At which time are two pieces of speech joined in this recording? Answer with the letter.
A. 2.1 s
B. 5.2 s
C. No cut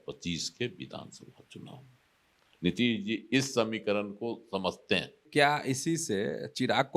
B